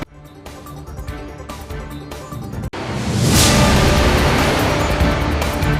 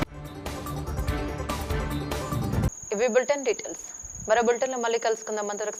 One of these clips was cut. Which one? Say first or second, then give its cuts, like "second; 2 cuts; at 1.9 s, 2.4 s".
first; 1 cut; at 2.7 s